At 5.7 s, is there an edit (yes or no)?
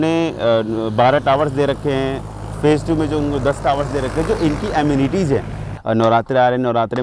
yes